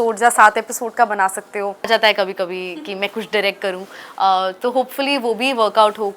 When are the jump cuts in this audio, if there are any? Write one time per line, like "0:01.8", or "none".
0:01.9